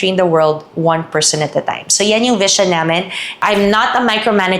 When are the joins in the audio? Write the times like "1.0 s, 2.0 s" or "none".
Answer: 3.4 s